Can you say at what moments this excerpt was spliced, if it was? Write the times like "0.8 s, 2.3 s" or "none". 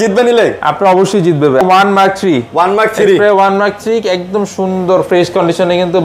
1.6 s